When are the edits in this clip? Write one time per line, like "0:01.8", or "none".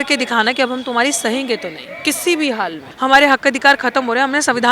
0:02.8